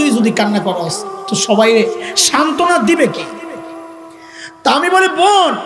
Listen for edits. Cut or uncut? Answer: cut